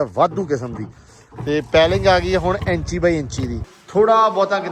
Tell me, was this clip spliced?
yes; 1 cut; at 3.6 s

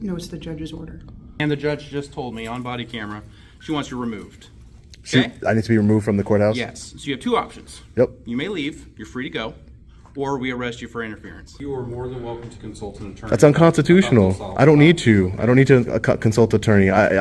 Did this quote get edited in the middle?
yes; 2 cuts; at 1.4 s, 11.5 s

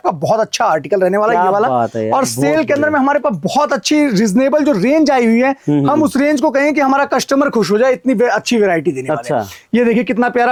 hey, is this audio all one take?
yes; 0 cuts

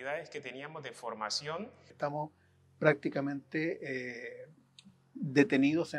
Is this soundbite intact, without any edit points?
no; 1 cut; at 1.9 s

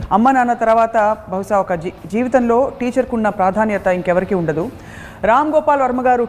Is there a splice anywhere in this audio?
no; 0 cuts

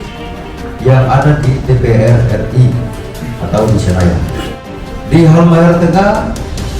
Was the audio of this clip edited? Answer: yes; 1 cut; at 4.9 s

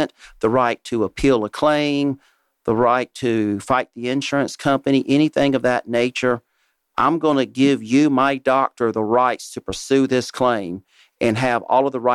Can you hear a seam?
no; 0 cuts

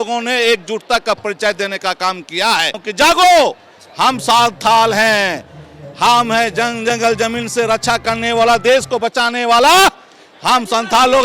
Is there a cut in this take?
yes; 1 cut; at 2.8 s

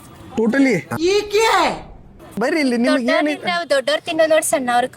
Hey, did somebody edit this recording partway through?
yes; 1 cut; at 2.4 s

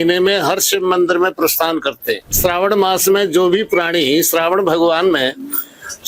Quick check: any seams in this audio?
yes; 1 cut; at 2.3 s

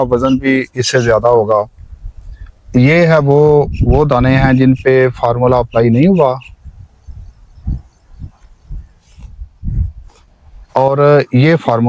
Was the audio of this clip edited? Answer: no; 0 cuts

